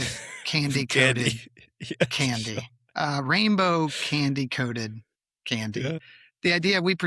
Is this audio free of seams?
no; 1 cut; at 6.0 s

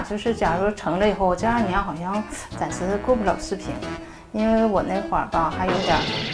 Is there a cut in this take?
no; 0 cuts

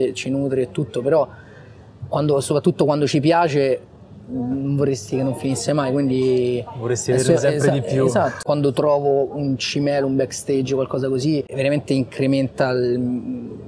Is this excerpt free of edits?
no; 2 cuts; at 8.4 s, 11.5 s

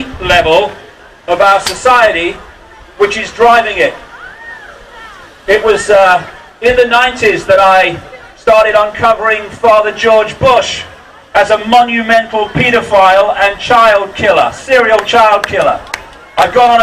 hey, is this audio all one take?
yes; 0 cuts

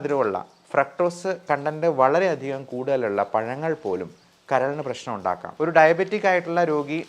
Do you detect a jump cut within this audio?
yes; 1 cut; at 5.4 s

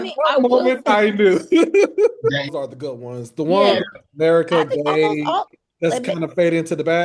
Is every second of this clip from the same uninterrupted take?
no; 1 cut; at 2.5 s

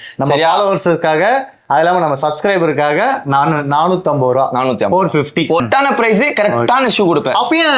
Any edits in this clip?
yes; 1 cut; at 5.6 s

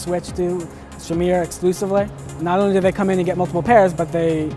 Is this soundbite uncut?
no; 1 cut; at 2.2 s

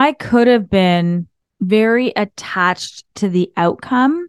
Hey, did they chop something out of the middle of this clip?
no; 0 cuts

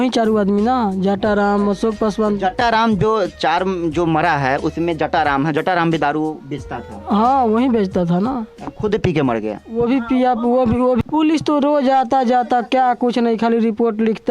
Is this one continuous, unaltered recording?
no; 1 cut; at 11.0 s

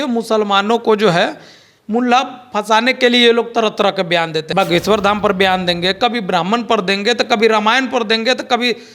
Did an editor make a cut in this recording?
yes; 1 cut; at 4.4 s

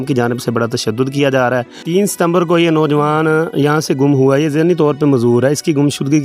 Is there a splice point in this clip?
yes; 1 cut; at 1.8 s

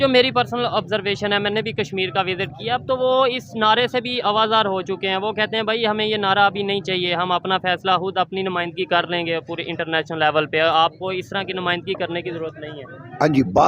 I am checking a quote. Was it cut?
no; 0 cuts

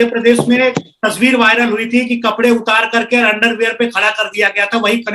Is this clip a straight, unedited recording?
yes; 0 cuts

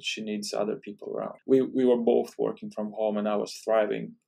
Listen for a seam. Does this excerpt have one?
yes; 1 cut; at 1.4 s

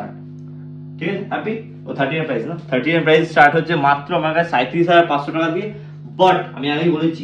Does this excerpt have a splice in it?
no; 0 cuts

